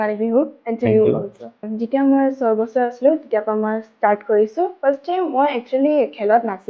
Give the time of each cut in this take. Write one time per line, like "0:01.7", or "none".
0:01.7